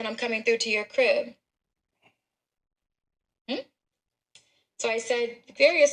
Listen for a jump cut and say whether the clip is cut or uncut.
uncut